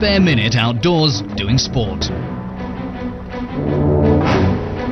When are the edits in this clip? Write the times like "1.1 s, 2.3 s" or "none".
1.4 s